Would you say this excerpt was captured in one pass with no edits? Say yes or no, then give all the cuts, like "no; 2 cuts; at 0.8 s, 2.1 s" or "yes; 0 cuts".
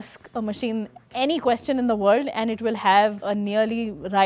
no; 1 cut; at 3.2 s